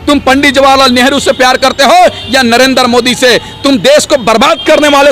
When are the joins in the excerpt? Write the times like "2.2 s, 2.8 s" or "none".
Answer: none

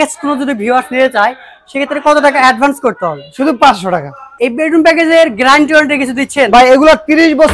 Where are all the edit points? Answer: 4.2 s

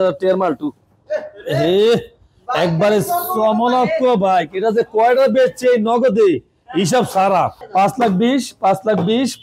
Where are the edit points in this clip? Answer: 7.6 s

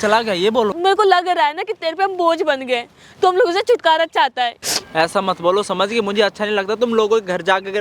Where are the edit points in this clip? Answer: 0.8 s, 4.6 s

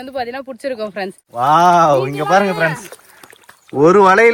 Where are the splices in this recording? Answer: 1.2 s

